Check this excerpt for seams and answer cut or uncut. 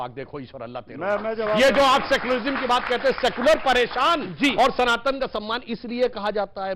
uncut